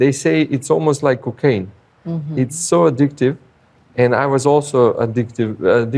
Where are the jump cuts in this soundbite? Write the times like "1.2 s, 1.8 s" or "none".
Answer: none